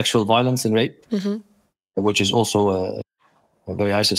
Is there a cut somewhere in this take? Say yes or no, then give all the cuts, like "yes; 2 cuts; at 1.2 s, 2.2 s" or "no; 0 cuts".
no; 0 cuts